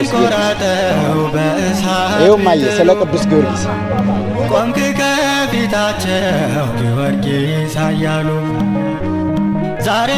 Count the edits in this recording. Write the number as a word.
zero